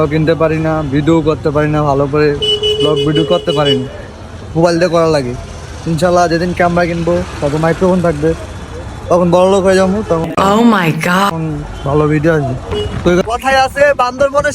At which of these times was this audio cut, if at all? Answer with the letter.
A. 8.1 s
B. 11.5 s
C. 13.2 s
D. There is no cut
C